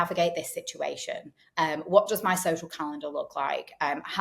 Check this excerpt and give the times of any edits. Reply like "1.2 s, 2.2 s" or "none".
none